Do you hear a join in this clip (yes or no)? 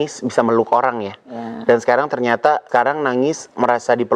yes